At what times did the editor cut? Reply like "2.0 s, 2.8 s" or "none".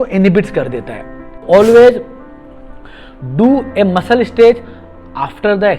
1.4 s